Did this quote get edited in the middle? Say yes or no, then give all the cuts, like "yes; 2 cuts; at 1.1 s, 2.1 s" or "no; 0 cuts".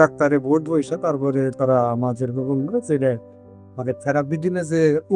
no; 0 cuts